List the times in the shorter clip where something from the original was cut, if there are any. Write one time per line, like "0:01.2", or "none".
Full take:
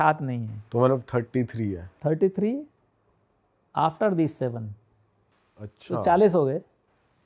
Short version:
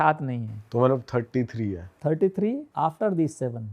0:02.7